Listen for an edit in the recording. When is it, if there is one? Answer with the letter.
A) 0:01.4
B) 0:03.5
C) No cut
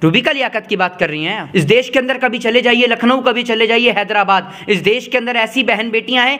A